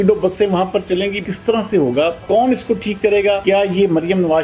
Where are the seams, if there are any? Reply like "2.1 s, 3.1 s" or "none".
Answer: 1.2 s, 2.2 s, 3.4 s